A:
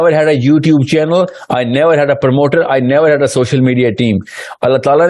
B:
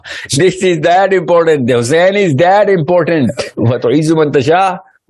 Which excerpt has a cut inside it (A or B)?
B